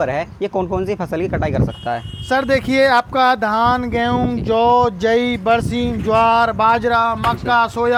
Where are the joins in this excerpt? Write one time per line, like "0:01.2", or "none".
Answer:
none